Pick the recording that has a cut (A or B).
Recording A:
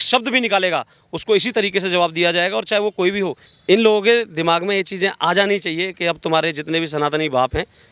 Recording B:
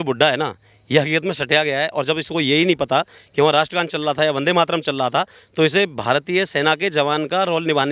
A